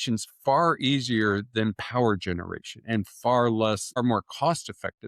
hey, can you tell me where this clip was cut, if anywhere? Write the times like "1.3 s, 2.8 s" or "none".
none

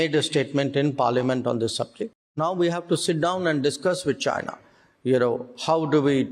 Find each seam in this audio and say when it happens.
2.0 s

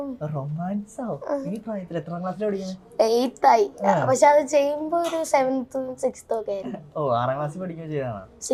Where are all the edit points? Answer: none

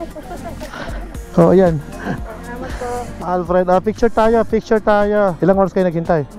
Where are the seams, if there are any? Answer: 3.2 s

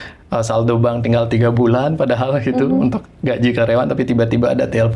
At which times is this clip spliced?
none

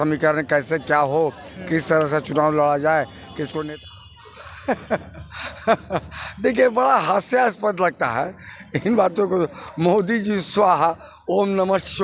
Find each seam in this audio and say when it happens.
3.6 s

